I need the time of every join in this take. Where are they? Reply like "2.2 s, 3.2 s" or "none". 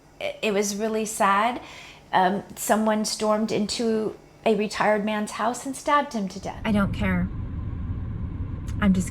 6.5 s